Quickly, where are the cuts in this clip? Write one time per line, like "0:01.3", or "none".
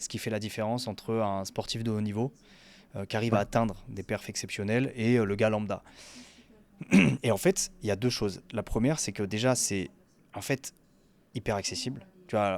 none